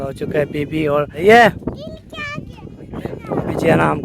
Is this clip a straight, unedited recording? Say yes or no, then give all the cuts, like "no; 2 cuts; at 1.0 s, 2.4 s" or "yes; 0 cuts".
no; 1 cut; at 1.1 s